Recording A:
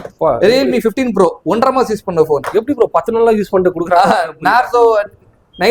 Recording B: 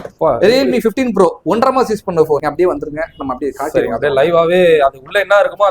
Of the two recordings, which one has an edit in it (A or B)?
B